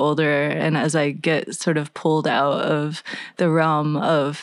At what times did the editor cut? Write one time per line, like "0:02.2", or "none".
none